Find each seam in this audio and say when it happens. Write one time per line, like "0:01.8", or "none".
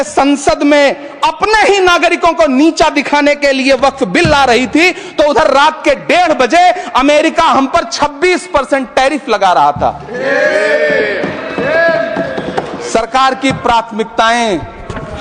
none